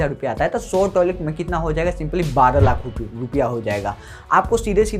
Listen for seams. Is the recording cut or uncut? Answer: uncut